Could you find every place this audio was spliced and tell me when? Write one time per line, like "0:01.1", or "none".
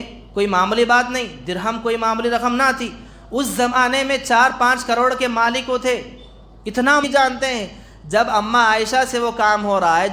0:07.0